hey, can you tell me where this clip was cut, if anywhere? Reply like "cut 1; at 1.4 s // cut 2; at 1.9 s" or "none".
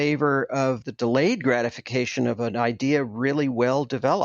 cut 1; at 0.8 s // cut 2; at 2.4 s

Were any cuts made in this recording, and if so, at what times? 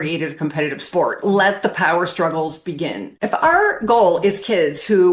cut 1; at 1.2 s // cut 2; at 3.1 s

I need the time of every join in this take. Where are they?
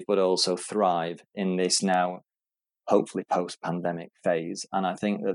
none

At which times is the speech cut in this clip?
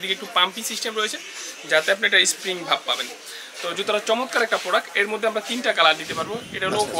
none

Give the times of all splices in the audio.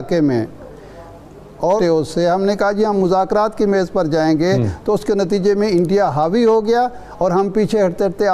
cut 1; at 1.8 s

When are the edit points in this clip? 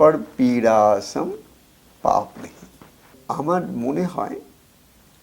cut 1; at 3.2 s

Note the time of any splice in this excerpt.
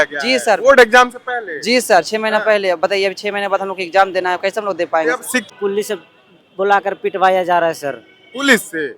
cut 1; at 5.5 s

